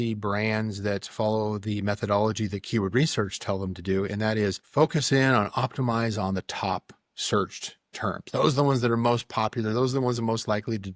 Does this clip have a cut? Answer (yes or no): yes